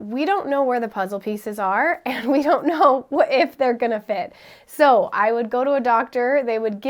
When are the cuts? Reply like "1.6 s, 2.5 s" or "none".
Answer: none